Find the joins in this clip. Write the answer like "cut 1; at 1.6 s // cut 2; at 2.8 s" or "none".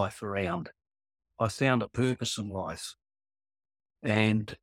cut 1; at 1.4 s

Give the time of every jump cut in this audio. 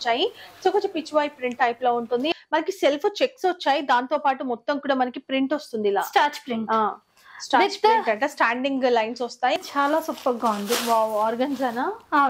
cut 1; at 2.3 s // cut 2; at 9.6 s

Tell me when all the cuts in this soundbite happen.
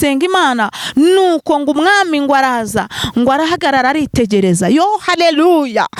none

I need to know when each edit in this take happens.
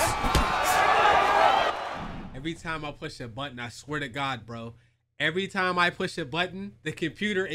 none

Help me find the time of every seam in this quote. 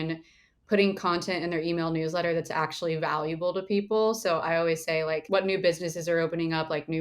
cut 1; at 5.2 s

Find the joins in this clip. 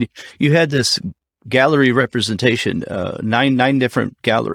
none

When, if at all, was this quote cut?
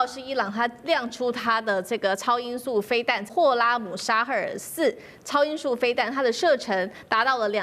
cut 1; at 3.3 s

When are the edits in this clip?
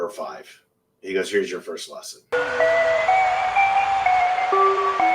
cut 1; at 2.2 s

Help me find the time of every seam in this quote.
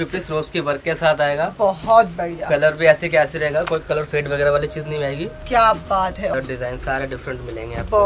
cut 1; at 6.3 s

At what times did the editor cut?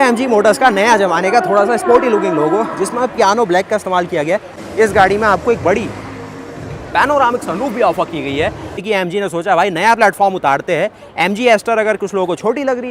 cut 1; at 4.6 s // cut 2; at 8.8 s

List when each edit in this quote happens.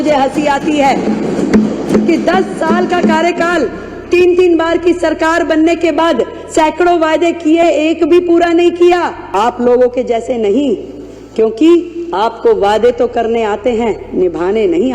cut 1; at 9.2 s

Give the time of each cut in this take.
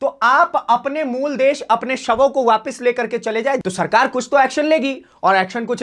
cut 1; at 3.6 s

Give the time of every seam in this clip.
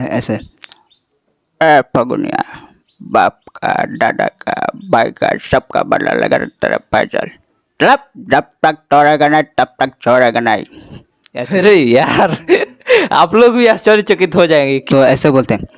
cut 1; at 14.8 s

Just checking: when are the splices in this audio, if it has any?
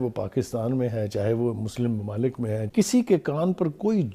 cut 1; at 2.6 s

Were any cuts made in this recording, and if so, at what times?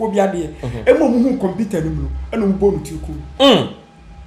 none

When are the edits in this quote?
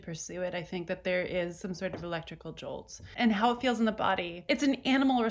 cut 1; at 3.1 s // cut 2; at 4.4 s

